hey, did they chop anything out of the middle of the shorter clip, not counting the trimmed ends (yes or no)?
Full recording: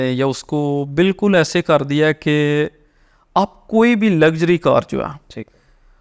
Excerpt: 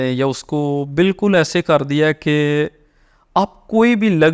no